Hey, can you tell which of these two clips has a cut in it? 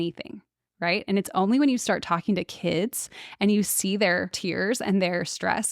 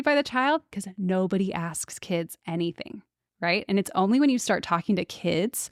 first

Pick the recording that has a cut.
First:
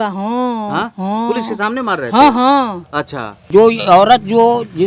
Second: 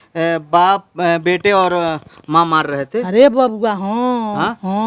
first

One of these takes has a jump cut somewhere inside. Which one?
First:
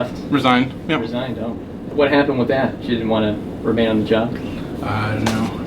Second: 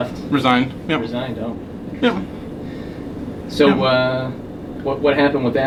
first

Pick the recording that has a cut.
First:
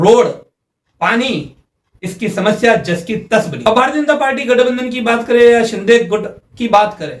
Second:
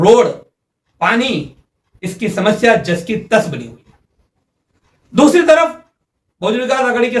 first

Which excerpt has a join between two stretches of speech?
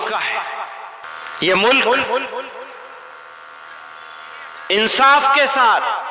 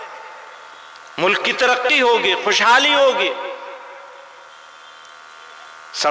first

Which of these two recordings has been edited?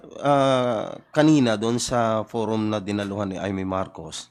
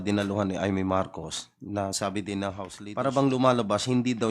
second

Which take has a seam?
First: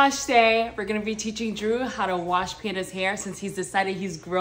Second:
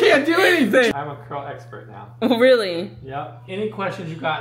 second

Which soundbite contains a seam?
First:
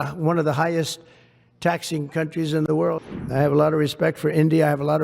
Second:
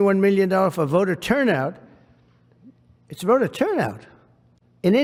first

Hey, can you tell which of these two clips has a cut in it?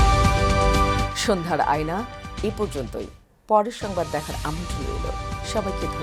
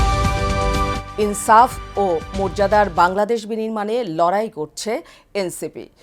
second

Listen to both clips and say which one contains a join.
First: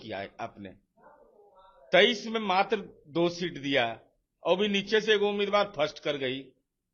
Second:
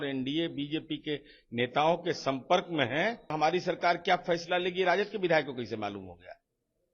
second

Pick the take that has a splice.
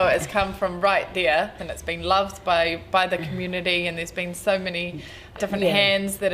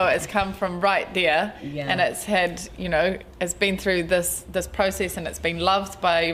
first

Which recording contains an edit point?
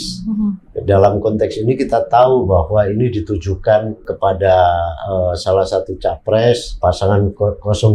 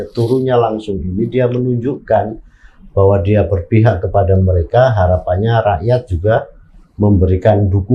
first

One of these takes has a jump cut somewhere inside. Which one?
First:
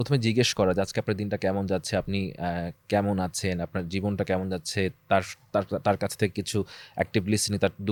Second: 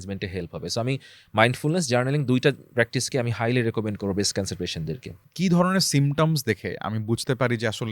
second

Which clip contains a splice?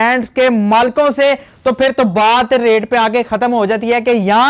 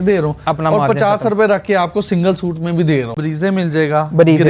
second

